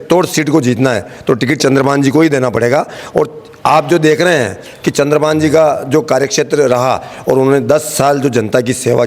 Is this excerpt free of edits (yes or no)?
yes